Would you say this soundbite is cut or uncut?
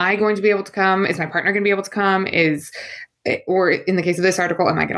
uncut